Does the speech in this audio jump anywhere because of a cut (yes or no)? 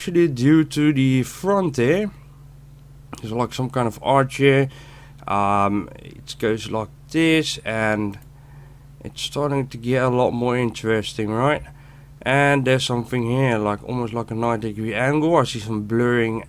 yes